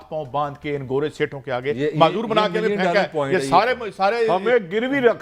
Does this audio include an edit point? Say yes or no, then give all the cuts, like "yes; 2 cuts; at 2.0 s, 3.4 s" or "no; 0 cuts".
no; 0 cuts